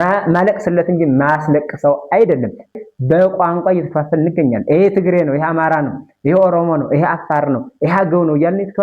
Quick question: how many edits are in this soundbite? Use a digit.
1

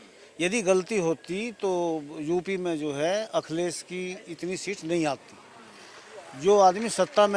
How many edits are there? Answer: 0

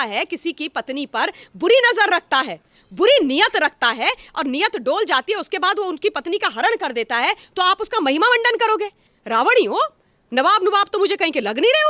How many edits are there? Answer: 1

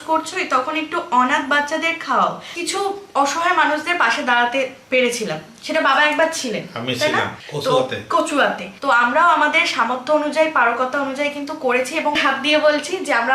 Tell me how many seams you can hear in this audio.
4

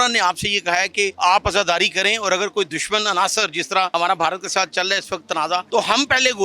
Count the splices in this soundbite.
3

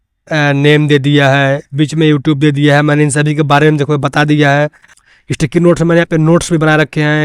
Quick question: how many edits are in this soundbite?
1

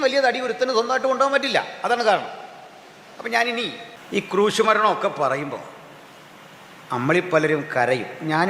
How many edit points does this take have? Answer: 1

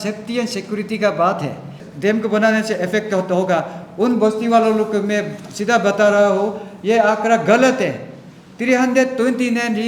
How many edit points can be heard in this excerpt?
1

